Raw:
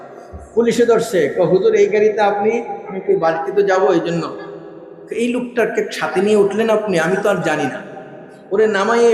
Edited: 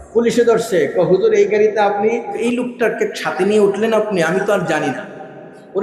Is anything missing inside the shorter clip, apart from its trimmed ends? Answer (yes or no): yes